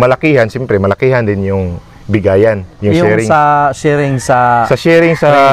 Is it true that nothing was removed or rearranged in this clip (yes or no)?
yes